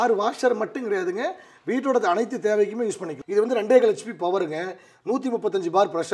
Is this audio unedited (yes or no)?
no